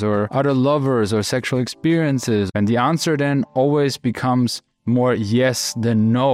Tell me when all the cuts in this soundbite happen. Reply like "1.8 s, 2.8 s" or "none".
2.5 s